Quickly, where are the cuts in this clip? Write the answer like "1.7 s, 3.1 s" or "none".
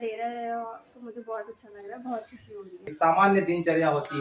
2.9 s